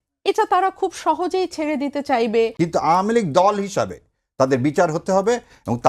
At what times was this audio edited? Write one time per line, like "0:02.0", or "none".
0:02.5